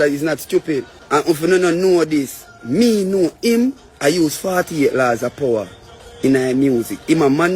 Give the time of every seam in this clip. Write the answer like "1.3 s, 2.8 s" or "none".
1.0 s